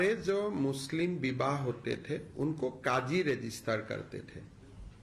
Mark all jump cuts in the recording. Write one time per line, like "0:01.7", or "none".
0:02.6